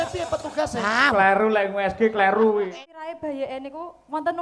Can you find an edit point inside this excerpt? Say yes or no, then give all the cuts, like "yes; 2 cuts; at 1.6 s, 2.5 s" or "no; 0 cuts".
yes; 1 cut; at 2.7 s